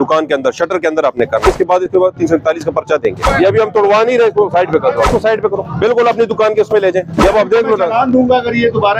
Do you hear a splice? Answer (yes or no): yes